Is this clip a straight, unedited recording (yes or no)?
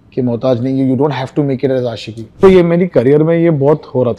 no